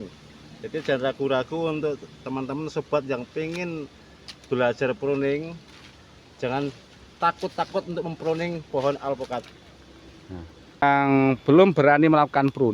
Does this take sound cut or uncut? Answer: cut